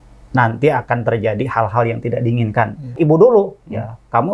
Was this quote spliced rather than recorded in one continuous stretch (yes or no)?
yes